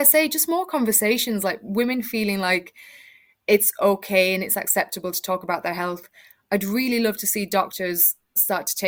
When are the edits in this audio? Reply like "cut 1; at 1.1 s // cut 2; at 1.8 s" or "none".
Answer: none